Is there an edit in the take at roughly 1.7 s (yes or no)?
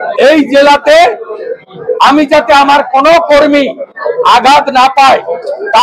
no